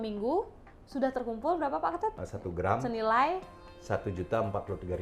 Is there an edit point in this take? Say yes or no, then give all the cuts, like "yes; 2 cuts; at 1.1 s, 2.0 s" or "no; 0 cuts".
yes; 1 cut; at 2.2 s